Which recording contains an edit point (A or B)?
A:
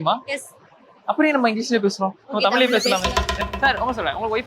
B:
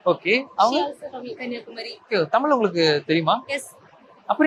A